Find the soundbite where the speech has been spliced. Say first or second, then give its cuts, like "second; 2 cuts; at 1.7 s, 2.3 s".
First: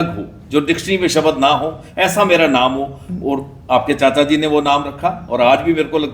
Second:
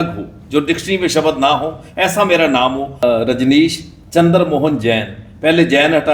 second; 1 cut; at 3.0 s